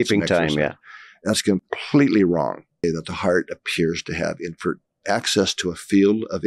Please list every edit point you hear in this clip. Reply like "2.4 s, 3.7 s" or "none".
2.8 s